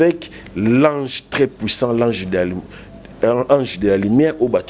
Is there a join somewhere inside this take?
no; 0 cuts

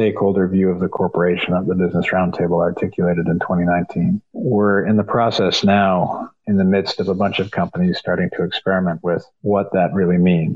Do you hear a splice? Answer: yes; 3 cuts; at 4.3 s, 6.3 s, 9.3 s

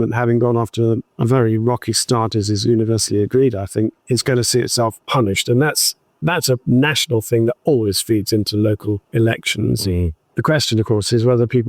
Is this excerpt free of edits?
no; 2 cuts; at 4.0 s, 10.3 s

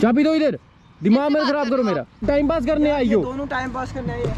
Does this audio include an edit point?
yes; 1 cut; at 2.2 s

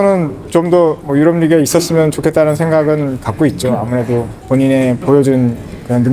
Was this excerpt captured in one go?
no; 2 cuts; at 1.0 s, 4.4 s

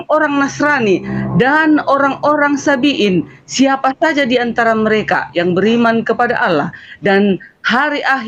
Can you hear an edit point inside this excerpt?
no; 0 cuts

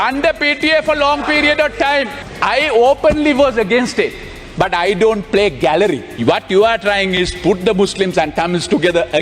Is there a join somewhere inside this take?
yes; 2 cuts; at 2.2 s, 6.1 s

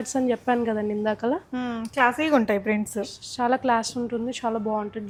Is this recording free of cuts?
yes; 0 cuts

